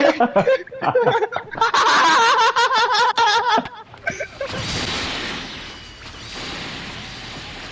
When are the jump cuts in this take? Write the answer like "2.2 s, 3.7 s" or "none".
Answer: 4.2 s

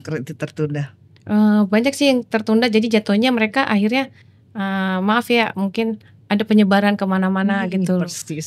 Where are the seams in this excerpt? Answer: none

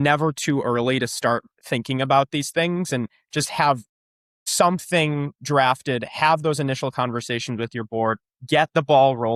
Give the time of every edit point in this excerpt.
none

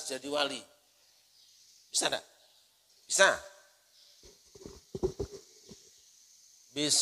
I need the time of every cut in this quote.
none

